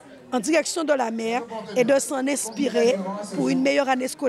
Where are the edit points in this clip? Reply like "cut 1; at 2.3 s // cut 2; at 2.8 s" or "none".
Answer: none